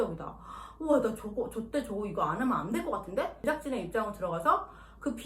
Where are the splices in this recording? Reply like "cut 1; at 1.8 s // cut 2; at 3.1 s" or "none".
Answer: cut 1; at 3.4 s